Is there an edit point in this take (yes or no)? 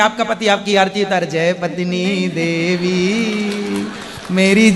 no